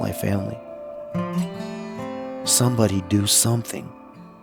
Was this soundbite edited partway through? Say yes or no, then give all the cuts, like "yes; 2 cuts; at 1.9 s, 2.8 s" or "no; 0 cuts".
no; 0 cuts